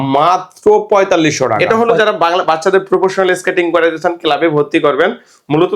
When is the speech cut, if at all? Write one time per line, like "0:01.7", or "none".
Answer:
0:01.6